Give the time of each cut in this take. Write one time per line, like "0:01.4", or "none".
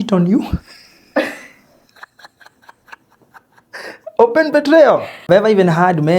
0:05.2